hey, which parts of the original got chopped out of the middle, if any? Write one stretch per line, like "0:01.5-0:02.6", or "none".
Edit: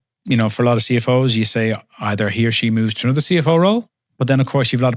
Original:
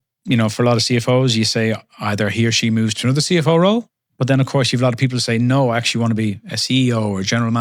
none